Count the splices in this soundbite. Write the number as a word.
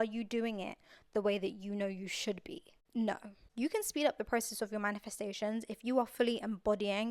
two